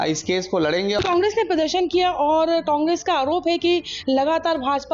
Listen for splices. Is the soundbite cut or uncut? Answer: cut